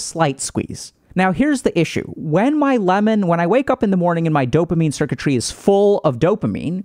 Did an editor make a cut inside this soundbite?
no; 0 cuts

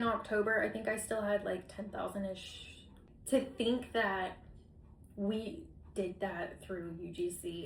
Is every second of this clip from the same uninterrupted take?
no; 1 cut; at 3.1 s

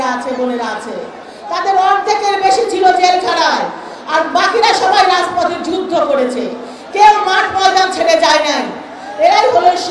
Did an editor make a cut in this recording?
no; 0 cuts

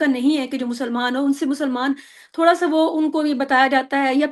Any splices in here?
no; 0 cuts

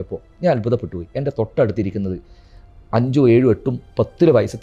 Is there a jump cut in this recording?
no; 0 cuts

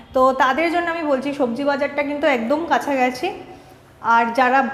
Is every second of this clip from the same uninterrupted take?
yes; 0 cuts

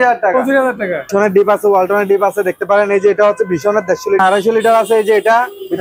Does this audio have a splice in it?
yes; 2 cuts; at 1.1 s, 4.2 s

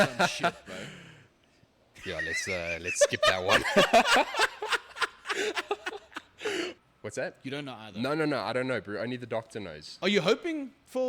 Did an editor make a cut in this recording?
yes; 1 cut; at 6.7 s

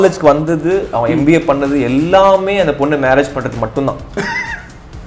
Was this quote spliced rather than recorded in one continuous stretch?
no; 0 cuts

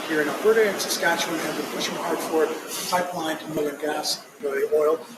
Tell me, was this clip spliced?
yes; 1 cut; at 3.6 s

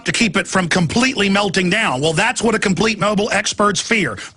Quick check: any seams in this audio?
no; 0 cuts

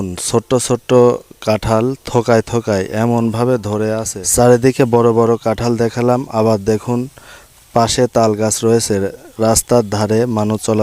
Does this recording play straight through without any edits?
no; 1 cut; at 4.1 s

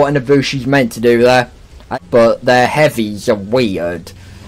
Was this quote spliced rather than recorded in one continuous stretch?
yes; 1 cut; at 1.9 s

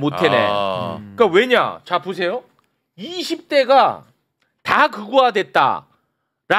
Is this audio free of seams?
yes; 0 cuts

